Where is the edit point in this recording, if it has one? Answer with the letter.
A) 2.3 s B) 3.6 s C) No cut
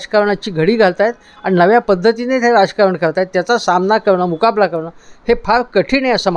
C